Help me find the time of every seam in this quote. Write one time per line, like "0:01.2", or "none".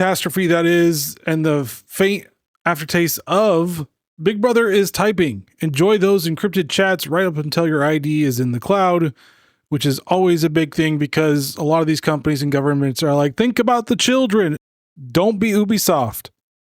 0:14.6